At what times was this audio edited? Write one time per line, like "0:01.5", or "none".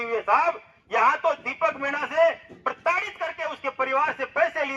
none